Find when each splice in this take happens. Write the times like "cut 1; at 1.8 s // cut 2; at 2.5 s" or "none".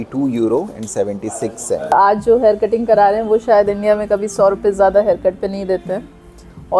cut 1; at 1.9 s